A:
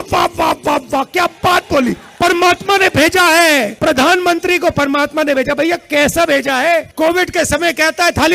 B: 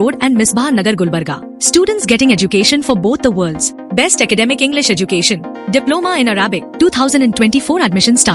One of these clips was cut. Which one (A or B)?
A